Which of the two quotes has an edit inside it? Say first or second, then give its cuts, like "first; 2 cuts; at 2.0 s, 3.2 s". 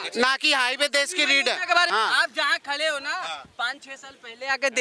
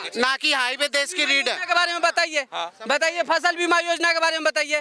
first; 1 cut; at 1.9 s